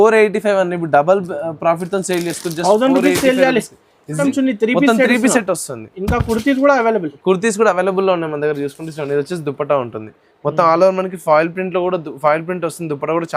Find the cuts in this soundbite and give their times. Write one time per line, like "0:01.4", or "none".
0:04.2